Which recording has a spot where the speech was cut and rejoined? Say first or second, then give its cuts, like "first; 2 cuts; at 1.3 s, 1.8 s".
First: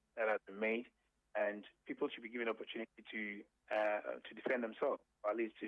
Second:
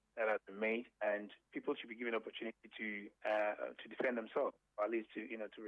second; 2 cuts; at 0.9 s, 3.1 s